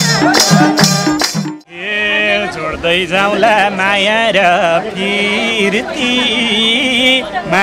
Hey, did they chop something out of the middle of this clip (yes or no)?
yes